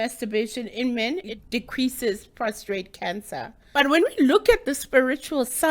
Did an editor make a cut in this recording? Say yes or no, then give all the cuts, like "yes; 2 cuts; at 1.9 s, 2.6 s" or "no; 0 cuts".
yes; 2 cuts; at 1.3 s, 3.6 s